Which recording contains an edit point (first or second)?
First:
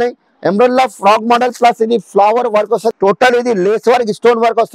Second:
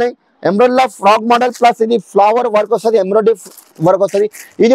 first